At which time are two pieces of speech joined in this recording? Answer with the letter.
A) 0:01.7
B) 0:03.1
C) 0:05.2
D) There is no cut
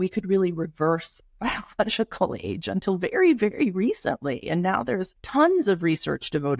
C